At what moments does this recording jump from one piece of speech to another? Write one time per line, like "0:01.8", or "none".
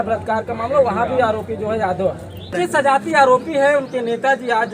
0:02.5